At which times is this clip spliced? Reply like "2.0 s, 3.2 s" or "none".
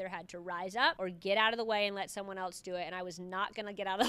1.0 s